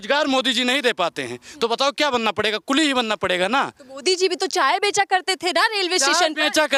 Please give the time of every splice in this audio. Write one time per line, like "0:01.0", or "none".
none